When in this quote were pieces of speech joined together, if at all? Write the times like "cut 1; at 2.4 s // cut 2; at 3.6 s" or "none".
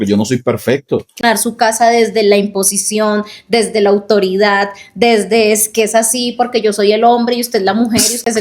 cut 1; at 1.2 s